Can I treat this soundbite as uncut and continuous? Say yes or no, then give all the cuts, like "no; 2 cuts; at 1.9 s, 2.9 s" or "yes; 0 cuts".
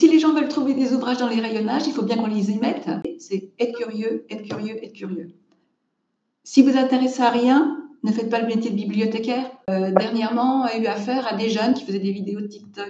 no; 2 cuts; at 3.2 s, 9.7 s